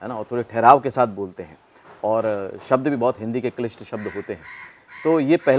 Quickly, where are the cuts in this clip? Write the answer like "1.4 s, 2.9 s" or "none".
none